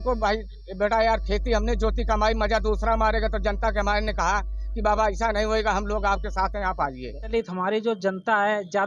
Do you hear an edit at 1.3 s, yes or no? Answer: no